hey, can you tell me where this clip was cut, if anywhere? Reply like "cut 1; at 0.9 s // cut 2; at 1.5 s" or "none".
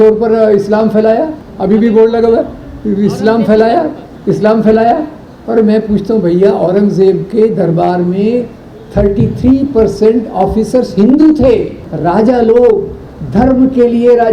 cut 1; at 11.8 s